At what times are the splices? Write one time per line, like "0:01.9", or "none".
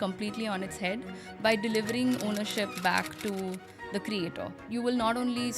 0:04.7